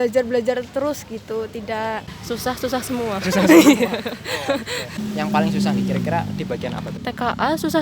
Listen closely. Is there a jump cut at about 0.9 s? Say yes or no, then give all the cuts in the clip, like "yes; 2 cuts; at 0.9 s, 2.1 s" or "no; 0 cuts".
no; 3 cuts; at 2.1 s, 5.0 s, 7.0 s